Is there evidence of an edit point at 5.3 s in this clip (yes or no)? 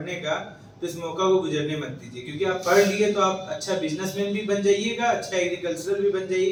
no